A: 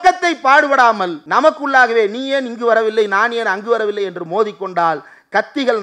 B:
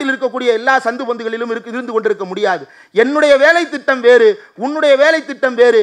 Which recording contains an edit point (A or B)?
A